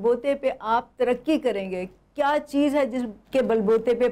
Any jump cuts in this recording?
no; 0 cuts

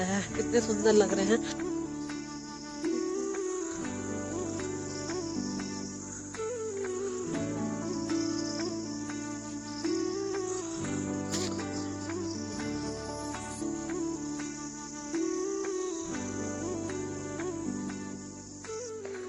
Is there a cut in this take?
no; 0 cuts

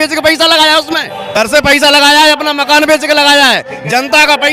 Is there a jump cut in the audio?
yes; 1 cut; at 1.4 s

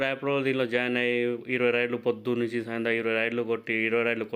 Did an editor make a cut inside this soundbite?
no; 0 cuts

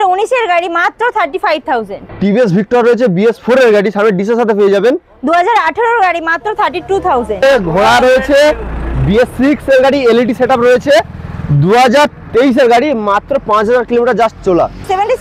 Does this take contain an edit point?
yes; 2 cuts; at 2.0 s, 7.4 s

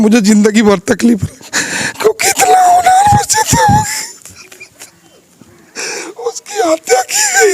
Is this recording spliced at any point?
no; 0 cuts

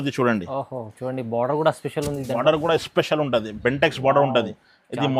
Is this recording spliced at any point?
no; 0 cuts

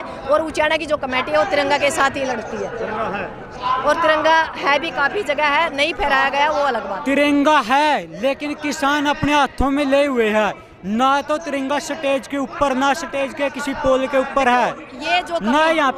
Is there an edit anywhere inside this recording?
no; 0 cuts

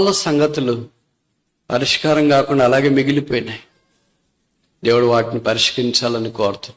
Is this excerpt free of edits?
yes; 0 cuts

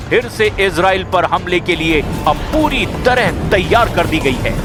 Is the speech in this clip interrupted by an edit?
no; 0 cuts

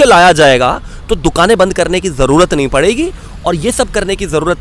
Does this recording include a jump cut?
no; 0 cuts

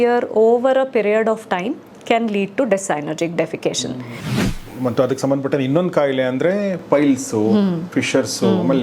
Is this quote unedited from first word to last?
no; 1 cut; at 4.5 s

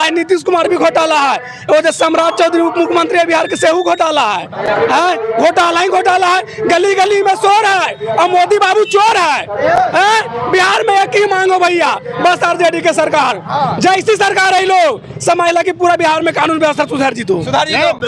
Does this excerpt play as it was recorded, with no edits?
yes; 0 cuts

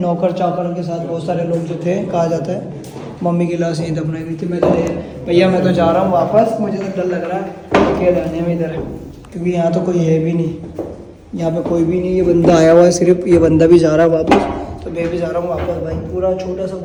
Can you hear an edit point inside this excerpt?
no; 0 cuts

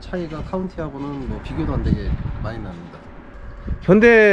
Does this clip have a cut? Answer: yes; 1 cut; at 3.2 s

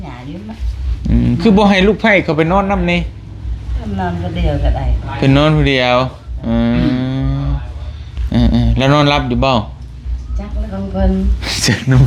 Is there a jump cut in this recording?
no; 0 cuts

